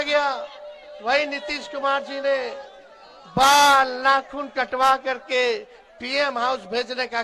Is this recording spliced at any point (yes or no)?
no